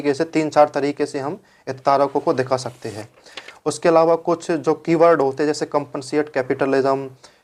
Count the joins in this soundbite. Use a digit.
0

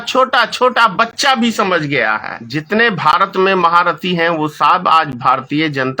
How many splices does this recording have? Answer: 1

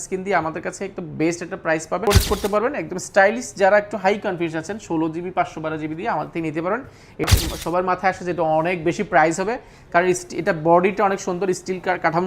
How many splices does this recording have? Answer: 2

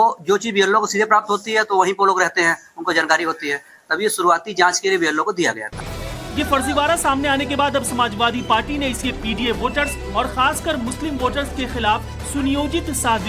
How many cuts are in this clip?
1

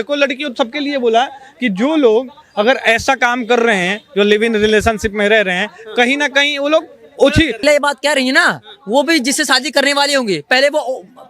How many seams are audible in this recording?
1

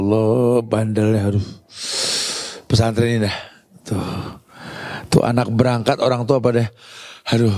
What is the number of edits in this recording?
0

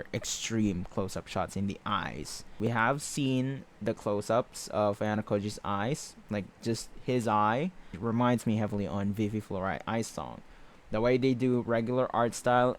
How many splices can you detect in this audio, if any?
2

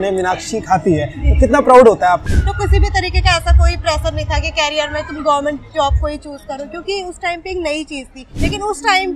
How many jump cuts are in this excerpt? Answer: 2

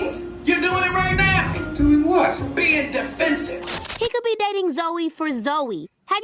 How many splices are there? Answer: 1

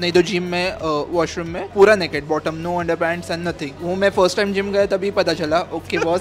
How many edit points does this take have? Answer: 2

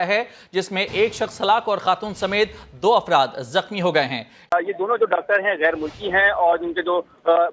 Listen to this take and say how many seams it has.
1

